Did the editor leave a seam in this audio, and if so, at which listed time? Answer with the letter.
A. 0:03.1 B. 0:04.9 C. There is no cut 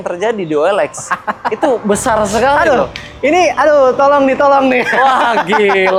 C